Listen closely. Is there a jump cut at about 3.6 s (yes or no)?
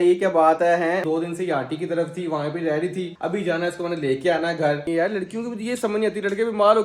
no